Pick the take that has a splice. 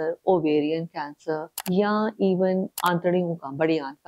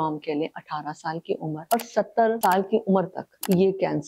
first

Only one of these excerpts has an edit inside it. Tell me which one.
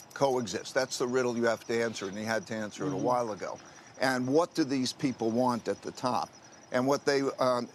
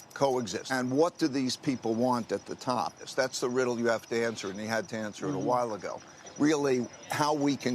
second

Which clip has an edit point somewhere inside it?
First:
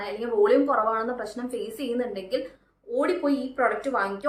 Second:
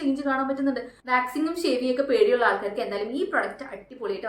second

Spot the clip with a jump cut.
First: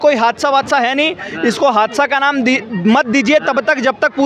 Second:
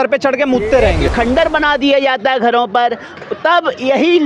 second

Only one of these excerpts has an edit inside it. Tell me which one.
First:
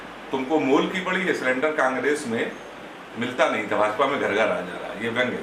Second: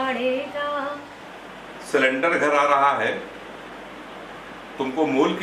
second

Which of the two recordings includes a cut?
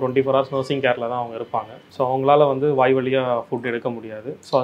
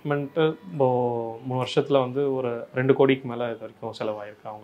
first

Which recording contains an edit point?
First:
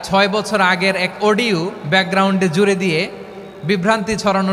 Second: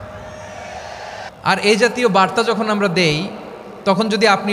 second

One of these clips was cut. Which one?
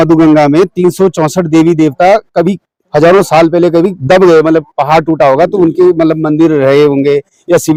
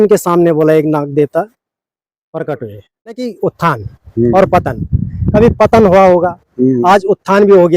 second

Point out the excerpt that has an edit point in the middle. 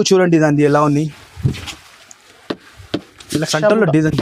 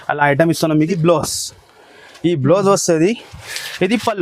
second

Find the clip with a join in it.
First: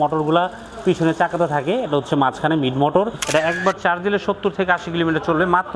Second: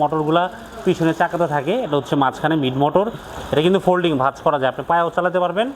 first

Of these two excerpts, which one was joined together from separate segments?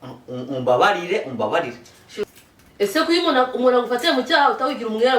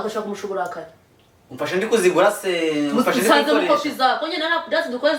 first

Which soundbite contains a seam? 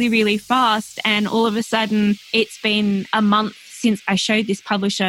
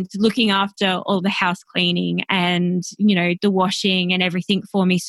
first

